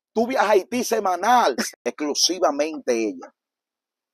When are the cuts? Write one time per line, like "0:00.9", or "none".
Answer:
0:01.6